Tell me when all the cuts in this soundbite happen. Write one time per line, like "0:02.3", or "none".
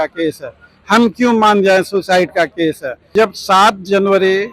0:03.1